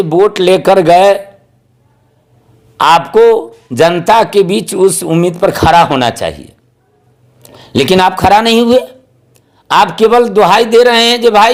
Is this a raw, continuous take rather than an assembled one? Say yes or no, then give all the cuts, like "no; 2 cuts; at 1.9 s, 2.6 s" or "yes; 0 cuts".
yes; 0 cuts